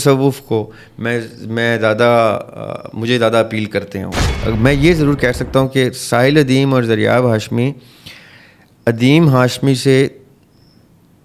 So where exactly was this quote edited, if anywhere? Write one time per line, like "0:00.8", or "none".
0:04.3